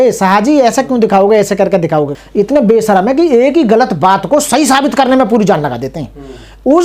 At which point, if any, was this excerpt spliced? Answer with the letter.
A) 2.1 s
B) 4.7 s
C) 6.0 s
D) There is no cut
A